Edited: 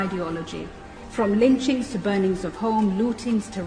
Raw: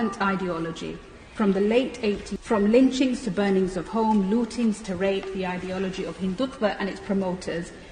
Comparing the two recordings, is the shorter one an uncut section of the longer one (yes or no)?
no